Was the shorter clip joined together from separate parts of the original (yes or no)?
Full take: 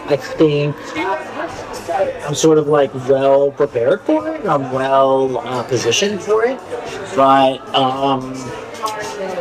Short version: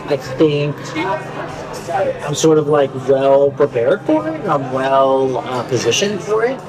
no